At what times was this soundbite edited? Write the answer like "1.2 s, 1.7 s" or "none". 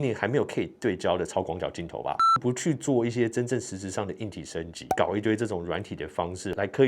2.3 s, 4.8 s